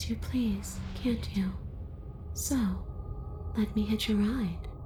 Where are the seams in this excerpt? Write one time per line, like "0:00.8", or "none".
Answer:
none